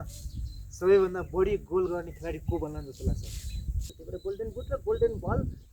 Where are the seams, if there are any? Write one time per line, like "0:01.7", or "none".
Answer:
0:03.9